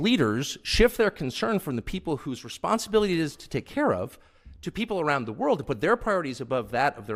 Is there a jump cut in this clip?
no; 0 cuts

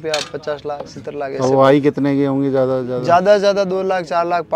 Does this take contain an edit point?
no; 0 cuts

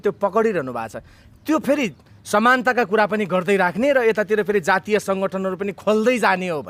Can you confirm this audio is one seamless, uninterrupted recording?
yes; 0 cuts

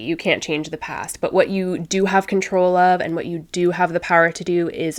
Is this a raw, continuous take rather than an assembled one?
yes; 0 cuts

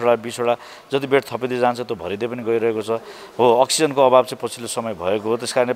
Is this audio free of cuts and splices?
yes; 0 cuts

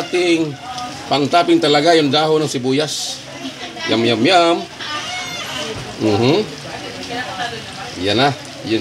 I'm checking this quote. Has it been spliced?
no; 0 cuts

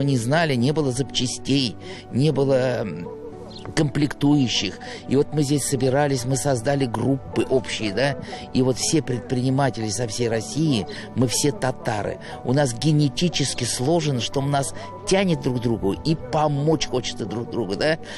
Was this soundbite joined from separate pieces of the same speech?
no; 0 cuts

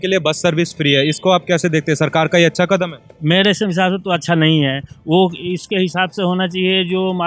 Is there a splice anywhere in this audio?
no; 0 cuts

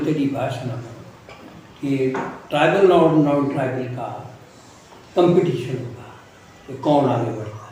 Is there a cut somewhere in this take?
no; 0 cuts

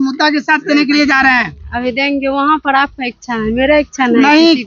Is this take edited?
no; 0 cuts

